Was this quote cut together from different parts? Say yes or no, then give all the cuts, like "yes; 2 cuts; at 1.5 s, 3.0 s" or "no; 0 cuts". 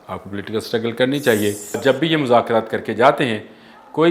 yes; 1 cut; at 1.8 s